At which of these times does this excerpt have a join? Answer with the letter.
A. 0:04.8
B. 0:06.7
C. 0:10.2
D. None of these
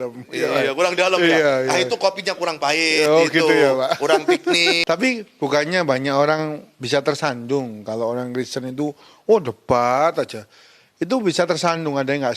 A